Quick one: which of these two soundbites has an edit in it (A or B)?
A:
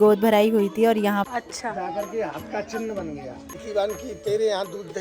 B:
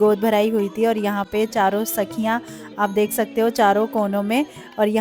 A